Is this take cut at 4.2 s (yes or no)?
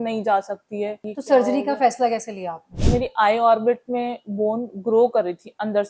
no